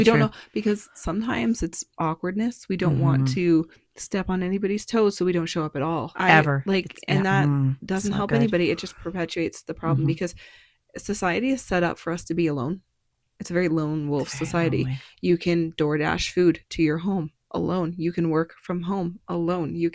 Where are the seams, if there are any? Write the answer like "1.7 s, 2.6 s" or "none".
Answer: 6.1 s